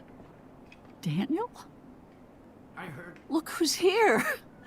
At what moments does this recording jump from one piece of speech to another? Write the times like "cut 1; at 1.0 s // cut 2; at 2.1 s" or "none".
cut 1; at 2.3 s